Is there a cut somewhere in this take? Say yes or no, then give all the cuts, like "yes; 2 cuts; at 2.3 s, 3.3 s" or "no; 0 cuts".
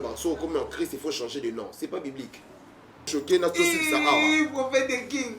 yes; 1 cut; at 3.1 s